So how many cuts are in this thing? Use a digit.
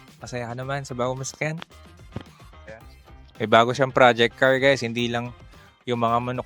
0